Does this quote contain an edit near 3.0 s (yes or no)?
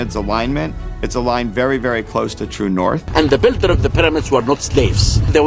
yes